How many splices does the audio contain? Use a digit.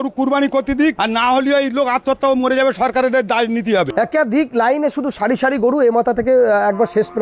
2